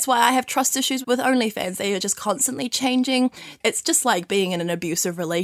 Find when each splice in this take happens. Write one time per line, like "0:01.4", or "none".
0:03.6